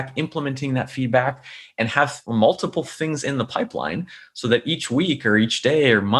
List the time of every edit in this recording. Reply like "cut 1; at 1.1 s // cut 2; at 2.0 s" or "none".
cut 1; at 2.2 s